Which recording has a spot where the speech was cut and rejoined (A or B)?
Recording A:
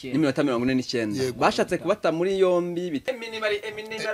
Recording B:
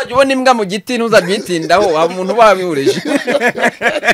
A